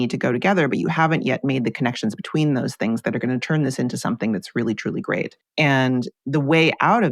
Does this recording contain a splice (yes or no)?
yes